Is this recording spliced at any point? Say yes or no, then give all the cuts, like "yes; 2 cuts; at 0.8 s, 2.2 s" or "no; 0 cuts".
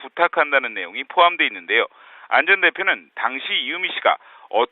yes; 1 cut; at 3.0 s